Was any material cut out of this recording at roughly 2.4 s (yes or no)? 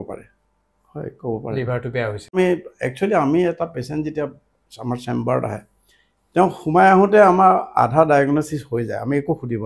yes